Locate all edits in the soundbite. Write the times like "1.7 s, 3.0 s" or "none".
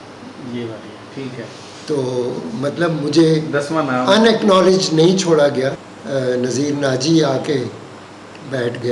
5.9 s